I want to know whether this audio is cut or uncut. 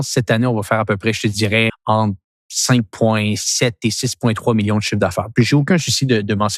uncut